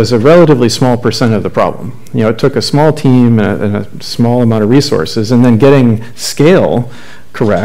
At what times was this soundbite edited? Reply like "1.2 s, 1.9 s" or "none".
none